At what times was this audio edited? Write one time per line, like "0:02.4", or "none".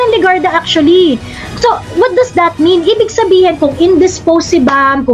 none